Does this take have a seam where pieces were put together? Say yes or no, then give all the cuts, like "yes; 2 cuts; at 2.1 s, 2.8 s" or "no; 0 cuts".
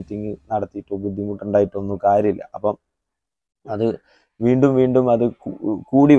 no; 0 cuts